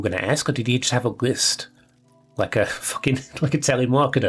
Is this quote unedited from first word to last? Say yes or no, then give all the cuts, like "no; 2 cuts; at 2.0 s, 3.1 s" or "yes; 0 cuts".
yes; 0 cuts